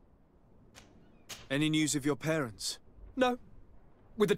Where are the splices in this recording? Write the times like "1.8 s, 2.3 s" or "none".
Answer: 1.4 s

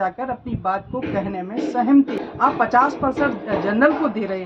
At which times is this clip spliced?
2.2 s

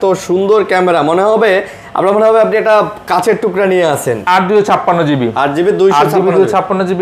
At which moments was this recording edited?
4.2 s

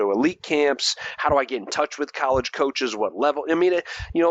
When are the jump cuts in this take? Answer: none

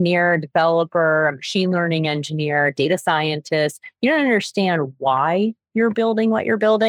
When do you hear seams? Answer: none

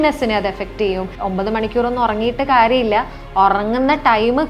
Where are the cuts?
1.1 s

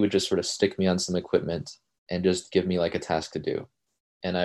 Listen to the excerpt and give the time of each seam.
none

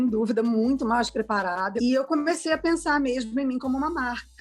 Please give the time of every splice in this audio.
1.7 s

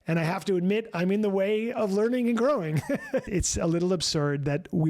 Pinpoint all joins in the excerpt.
3.3 s

